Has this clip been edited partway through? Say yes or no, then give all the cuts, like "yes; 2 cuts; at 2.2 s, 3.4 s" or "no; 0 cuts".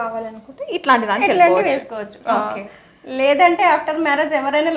no; 0 cuts